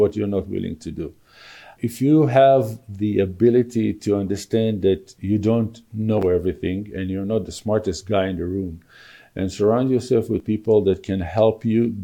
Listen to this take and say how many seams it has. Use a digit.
1